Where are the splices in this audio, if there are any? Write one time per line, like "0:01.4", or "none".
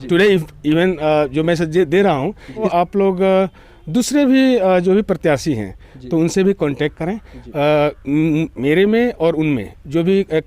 0:02.7